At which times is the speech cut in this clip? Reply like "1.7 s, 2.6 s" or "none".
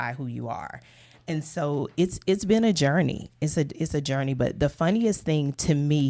none